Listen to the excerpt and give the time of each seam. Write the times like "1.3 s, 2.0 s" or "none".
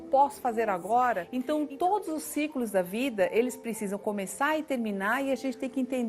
1.3 s